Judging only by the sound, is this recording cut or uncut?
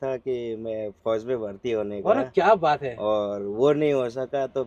uncut